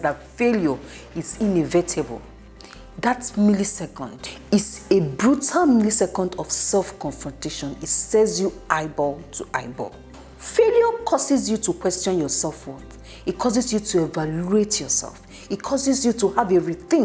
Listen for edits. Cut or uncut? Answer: uncut